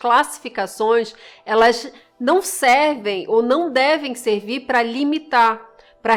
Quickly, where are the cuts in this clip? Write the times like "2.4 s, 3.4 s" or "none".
none